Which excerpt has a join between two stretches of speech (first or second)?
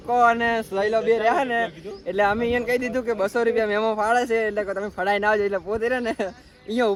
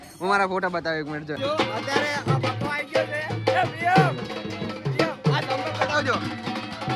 second